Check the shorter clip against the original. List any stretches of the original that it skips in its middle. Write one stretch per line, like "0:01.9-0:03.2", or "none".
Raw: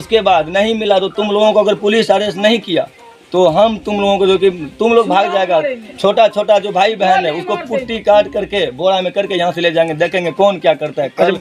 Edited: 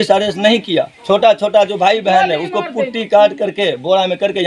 0:02.9-0:05.9